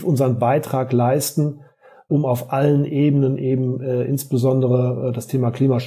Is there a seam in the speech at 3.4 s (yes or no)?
no